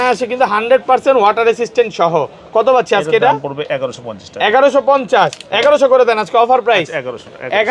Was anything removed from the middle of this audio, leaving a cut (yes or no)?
no